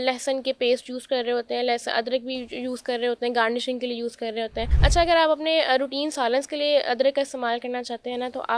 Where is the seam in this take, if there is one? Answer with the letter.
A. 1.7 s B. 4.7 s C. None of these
B